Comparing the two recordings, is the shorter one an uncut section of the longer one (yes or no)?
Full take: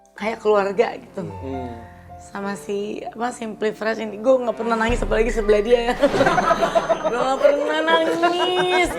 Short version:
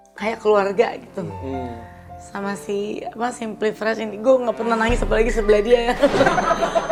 yes